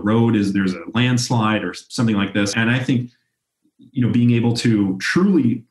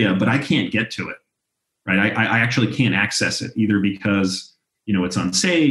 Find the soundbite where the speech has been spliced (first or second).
first